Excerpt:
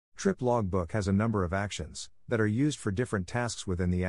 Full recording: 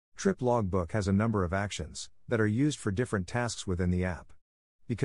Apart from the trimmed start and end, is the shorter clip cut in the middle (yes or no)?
no